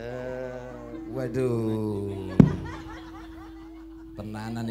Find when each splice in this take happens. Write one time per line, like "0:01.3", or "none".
none